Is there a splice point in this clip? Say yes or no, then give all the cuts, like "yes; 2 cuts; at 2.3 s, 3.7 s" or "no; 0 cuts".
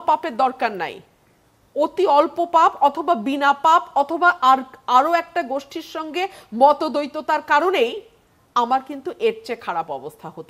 no; 0 cuts